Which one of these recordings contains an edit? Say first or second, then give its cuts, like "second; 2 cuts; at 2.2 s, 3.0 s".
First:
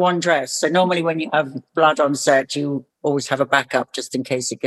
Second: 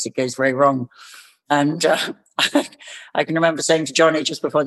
first; 1 cut; at 2.8 s